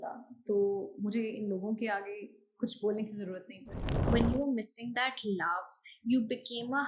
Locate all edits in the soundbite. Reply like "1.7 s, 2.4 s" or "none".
4.1 s